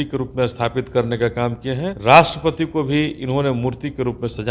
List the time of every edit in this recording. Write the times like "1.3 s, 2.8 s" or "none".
1.9 s